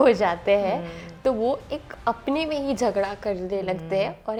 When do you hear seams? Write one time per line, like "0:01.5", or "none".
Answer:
none